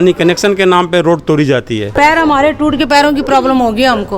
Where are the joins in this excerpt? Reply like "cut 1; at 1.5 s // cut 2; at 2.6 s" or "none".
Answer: cut 1; at 1.9 s